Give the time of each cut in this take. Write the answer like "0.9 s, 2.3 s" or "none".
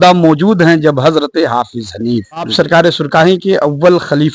2.5 s